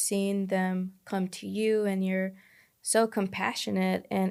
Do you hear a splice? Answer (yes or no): no